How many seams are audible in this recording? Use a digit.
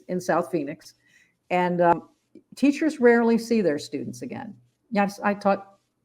1